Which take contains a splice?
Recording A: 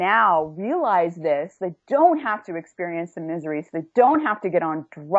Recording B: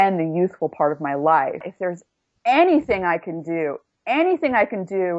B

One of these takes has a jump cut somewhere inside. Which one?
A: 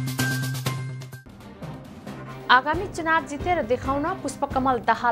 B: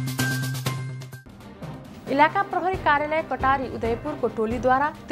A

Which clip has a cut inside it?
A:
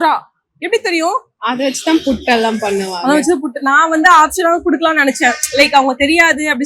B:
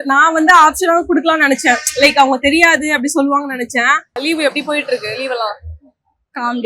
B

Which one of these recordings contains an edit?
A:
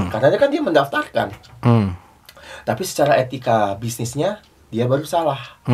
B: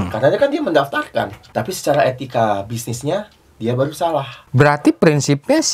B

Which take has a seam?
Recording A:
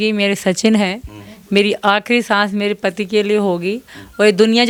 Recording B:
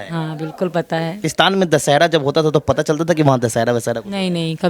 B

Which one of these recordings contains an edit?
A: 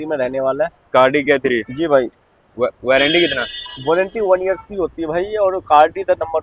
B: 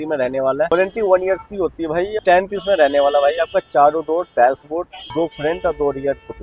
B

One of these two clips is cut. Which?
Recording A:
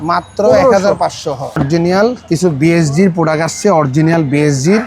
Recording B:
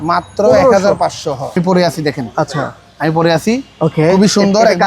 B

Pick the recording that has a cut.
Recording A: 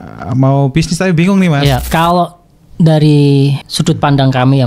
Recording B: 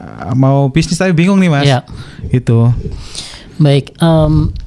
A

